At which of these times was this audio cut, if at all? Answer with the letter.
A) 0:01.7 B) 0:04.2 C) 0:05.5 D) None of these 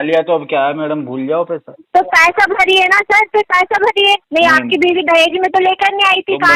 B